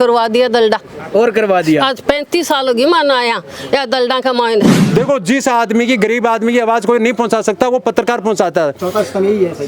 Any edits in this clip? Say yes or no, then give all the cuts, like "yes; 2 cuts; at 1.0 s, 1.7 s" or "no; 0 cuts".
yes; 1 cut; at 4.8 s